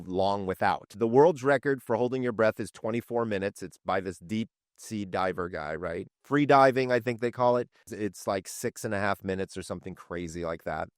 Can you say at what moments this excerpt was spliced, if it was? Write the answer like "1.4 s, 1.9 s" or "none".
0.9 s, 6.1 s